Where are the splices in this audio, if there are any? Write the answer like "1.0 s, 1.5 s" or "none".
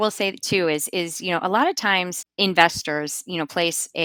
none

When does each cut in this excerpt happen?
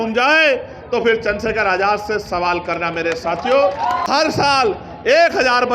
4.0 s

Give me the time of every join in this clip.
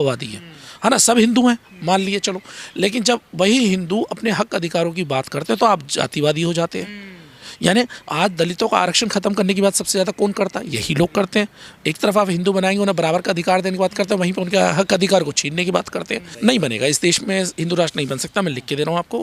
16.2 s

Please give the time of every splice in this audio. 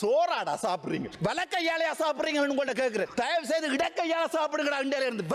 1.1 s

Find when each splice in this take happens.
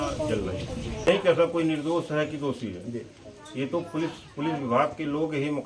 1.1 s

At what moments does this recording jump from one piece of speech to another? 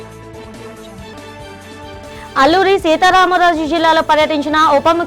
1.1 s

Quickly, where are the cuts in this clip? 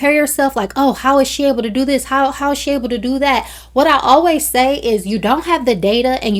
none

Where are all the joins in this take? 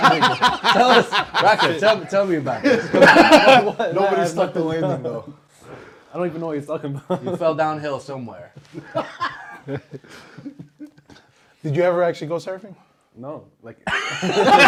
none

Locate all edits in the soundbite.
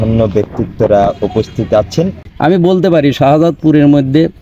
2.3 s

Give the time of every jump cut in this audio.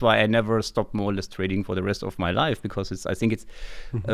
none

